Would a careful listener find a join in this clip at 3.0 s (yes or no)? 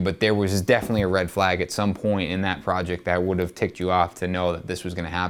no